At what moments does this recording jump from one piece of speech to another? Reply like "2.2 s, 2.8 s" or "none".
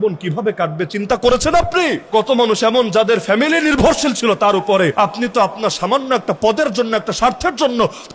2.0 s, 4.9 s